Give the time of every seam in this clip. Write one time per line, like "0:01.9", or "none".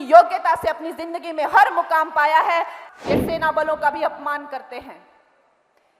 0:02.8